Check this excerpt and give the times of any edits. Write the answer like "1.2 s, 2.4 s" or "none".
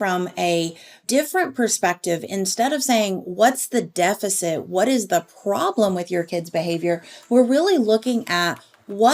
1.0 s

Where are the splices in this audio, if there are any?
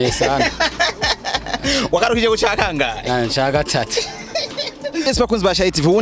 5.0 s

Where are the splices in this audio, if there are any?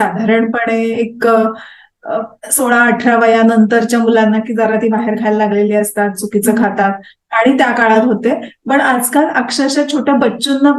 none

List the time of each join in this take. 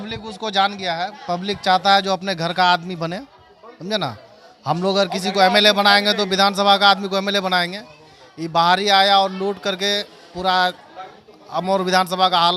none

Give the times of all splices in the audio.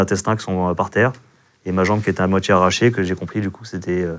none

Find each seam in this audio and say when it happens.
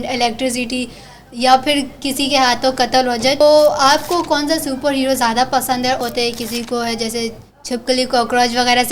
3.4 s, 6.0 s

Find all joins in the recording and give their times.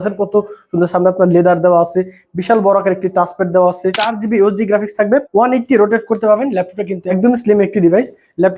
4.1 s, 5.3 s, 7.1 s

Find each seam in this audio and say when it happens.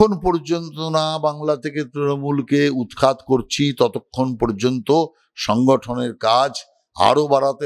none

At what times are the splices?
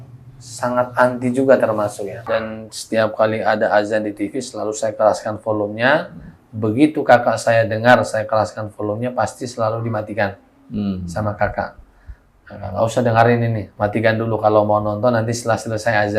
2.1 s

